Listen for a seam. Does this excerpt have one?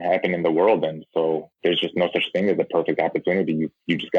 no; 0 cuts

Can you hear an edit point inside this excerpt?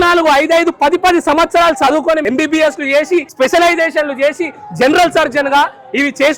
no; 0 cuts

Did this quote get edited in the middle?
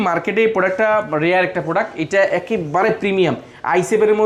no; 0 cuts

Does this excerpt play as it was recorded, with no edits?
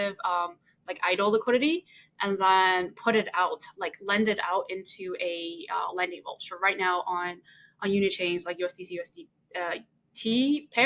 yes; 0 cuts

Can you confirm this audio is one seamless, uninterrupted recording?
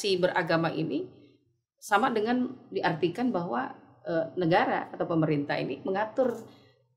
yes; 0 cuts

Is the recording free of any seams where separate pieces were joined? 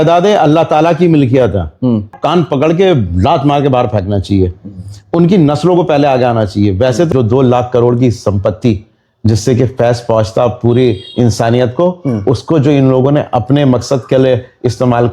no; 2 cuts; at 2.2 s, 7.1 s

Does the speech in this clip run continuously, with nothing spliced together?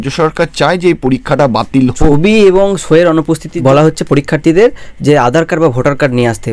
no; 2 cuts; at 2.1 s, 3.5 s

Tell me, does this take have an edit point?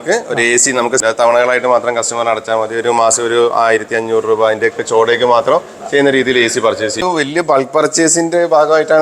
yes; 2 cuts; at 1.0 s, 7.0 s

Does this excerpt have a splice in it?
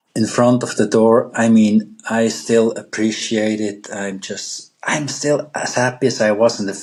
no; 0 cuts

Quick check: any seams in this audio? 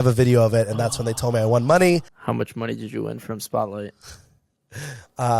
yes; 1 cut; at 2.1 s

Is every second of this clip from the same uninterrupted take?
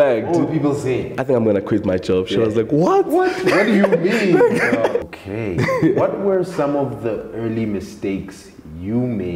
no; 2 cuts; at 1.1 s, 5.1 s

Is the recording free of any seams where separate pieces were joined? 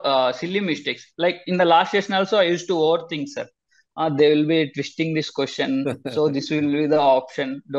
yes; 0 cuts

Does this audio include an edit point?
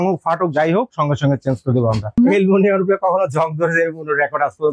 yes; 1 cut; at 2.2 s

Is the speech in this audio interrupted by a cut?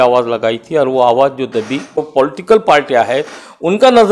yes; 1 cut; at 2.1 s

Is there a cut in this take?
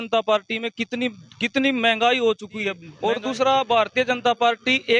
yes; 1 cut; at 2.9 s

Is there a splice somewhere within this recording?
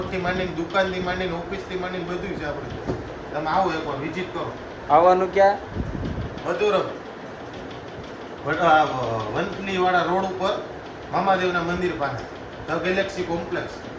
no; 0 cuts

